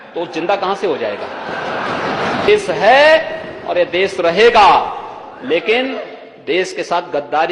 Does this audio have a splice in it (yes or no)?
yes